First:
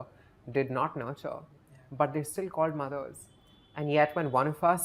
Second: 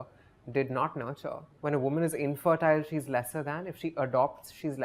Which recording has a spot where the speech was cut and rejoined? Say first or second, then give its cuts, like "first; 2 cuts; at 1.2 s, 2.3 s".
second; 1 cut; at 1.5 s